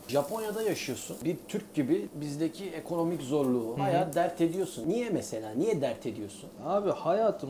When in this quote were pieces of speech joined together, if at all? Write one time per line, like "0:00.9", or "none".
0:01.2
0:06.5